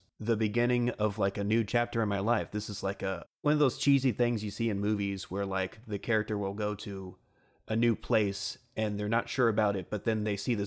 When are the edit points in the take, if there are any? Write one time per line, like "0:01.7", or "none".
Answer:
0:03.3